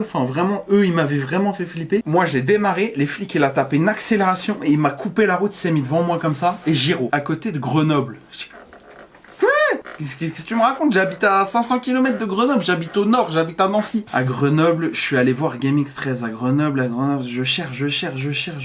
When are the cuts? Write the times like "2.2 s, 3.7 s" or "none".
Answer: 2.1 s, 7.1 s, 14.1 s